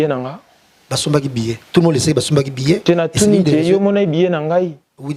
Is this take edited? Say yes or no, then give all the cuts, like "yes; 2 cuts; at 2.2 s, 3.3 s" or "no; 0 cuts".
no; 0 cuts